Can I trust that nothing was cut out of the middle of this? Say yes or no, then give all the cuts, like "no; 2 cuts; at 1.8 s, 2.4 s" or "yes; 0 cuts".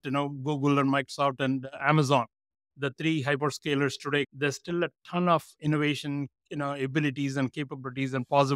yes; 0 cuts